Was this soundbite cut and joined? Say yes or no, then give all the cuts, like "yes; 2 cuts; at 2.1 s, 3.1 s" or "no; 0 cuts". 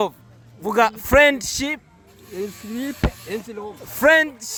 no; 0 cuts